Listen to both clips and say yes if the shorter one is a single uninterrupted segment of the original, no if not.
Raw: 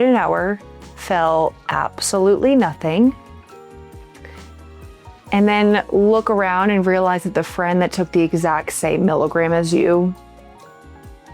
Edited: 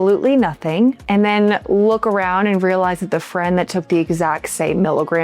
no